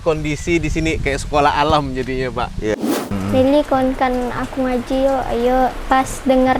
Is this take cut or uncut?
cut